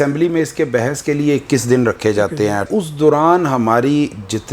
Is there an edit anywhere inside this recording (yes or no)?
yes